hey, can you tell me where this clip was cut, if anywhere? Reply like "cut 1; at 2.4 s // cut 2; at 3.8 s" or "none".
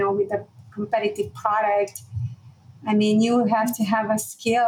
none